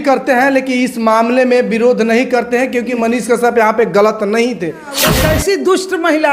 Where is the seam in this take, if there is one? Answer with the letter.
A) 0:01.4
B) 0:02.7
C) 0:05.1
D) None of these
C